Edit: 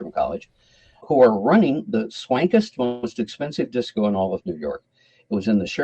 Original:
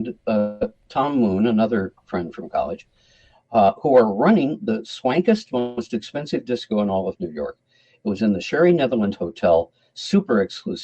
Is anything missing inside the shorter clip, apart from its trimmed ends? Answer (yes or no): yes